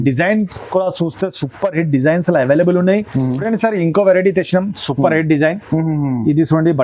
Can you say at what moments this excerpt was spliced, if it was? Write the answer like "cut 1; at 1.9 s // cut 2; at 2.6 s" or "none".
cut 1; at 3.4 s